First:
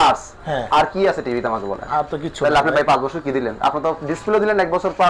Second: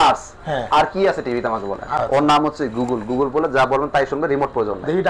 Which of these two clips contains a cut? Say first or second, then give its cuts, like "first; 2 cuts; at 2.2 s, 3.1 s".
second; 1 cut; at 1.9 s